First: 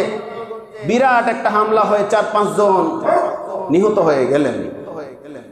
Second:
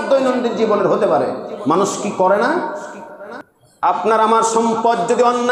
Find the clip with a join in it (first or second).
second